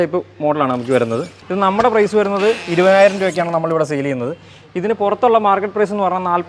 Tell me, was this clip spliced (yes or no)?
yes